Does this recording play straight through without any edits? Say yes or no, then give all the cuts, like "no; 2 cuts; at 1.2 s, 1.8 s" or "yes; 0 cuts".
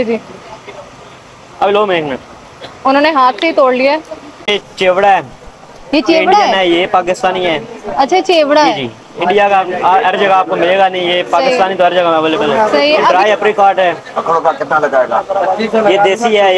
no; 2 cuts; at 4.5 s, 13.1 s